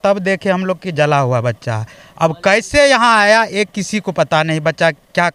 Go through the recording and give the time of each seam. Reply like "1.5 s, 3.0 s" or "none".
none